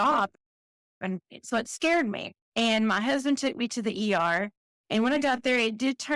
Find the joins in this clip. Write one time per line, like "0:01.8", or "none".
none